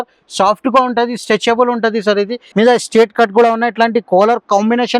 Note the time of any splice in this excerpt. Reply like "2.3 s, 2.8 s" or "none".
2.4 s